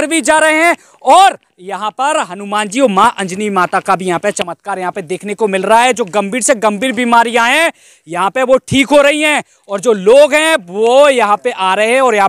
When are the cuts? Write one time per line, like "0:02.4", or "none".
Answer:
none